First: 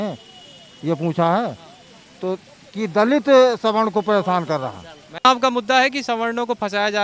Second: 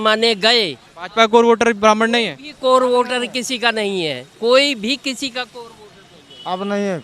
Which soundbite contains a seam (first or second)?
first